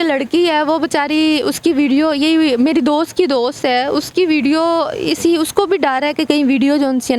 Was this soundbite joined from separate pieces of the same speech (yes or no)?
no